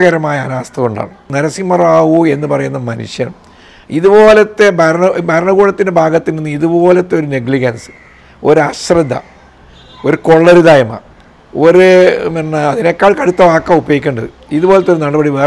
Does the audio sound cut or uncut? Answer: cut